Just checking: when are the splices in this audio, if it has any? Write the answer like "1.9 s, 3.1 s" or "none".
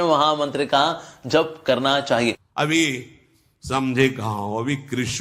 none